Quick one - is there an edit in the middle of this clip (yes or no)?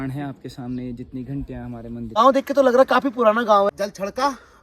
yes